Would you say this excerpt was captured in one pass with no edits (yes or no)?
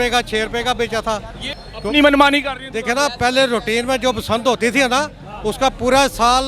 no